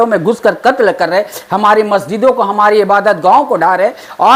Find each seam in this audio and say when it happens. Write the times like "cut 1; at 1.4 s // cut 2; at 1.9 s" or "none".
none